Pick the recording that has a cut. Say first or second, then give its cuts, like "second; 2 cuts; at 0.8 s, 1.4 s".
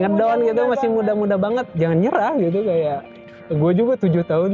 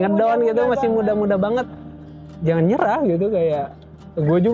first; 1 cut; at 1.7 s